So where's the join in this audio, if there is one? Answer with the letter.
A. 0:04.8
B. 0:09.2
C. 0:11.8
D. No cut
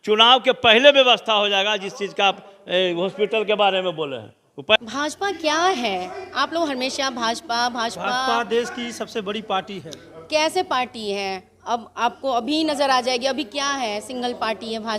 A